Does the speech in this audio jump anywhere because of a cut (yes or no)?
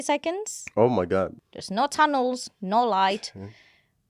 yes